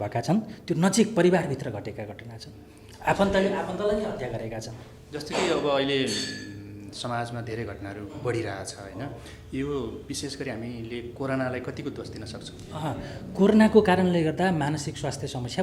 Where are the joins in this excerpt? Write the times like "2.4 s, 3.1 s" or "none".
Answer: none